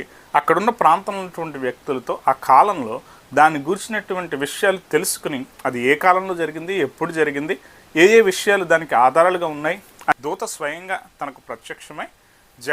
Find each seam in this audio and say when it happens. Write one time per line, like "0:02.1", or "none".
0:10.1